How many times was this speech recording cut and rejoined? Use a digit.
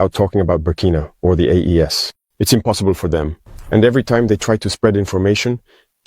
1